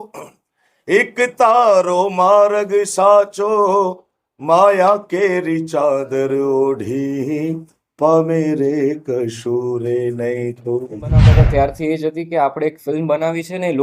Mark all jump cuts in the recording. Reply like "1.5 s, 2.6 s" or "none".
11.3 s